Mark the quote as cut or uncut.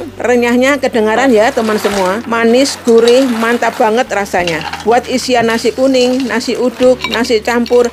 cut